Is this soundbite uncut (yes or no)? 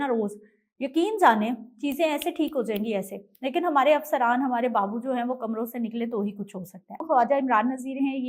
no